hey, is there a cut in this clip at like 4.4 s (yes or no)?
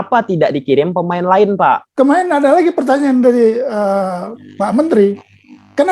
no